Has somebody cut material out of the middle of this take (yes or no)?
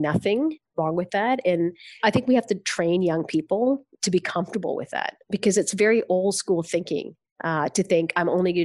no